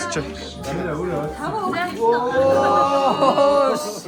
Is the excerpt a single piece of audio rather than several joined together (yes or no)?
yes